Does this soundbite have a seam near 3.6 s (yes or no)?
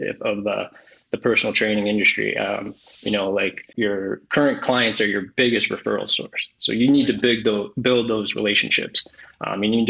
yes